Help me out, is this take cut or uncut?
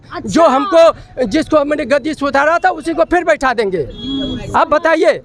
uncut